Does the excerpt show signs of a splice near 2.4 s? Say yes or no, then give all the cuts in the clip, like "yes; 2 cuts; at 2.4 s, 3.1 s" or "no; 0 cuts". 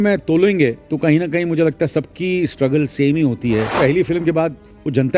no; 2 cuts; at 0.8 s, 3.8 s